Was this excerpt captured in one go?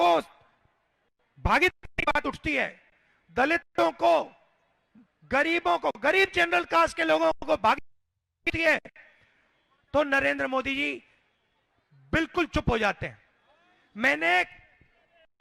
yes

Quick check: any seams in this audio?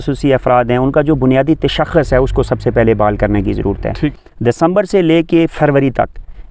yes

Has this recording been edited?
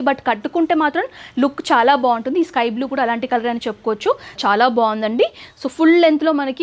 yes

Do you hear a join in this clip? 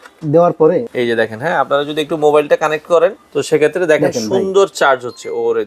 yes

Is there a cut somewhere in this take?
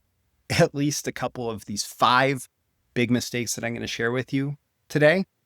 yes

